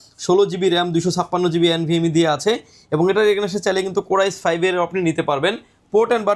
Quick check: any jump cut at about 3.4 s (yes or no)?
no